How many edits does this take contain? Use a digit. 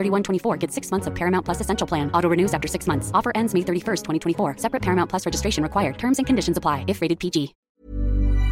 1